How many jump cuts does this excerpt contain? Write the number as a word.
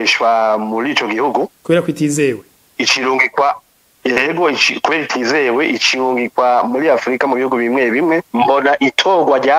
one